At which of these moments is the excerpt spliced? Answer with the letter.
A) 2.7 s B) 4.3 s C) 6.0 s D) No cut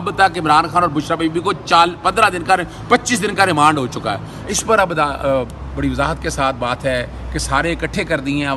B